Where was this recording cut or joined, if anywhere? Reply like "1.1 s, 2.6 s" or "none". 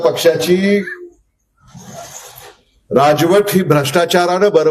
none